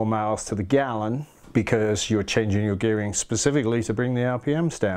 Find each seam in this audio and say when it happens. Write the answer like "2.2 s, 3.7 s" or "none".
1.3 s